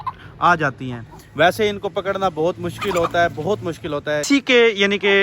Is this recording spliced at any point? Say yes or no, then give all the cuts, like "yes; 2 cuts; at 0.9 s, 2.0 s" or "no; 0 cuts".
yes; 1 cut; at 4.2 s